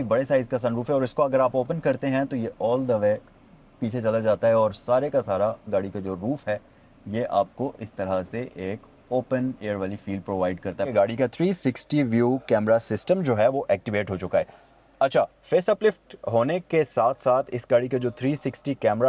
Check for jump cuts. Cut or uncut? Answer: cut